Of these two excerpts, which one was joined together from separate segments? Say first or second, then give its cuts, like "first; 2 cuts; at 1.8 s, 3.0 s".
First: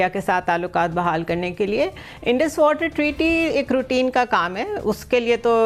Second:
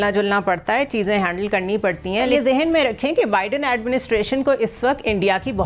second; 1 cut; at 2.3 s